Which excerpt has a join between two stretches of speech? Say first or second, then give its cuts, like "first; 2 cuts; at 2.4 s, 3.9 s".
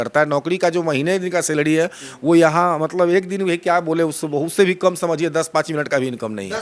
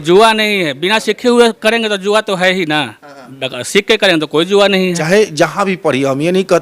second; 1 cut; at 5.0 s